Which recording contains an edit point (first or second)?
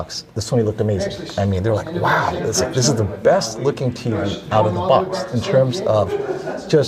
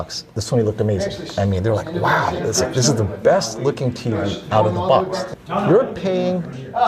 second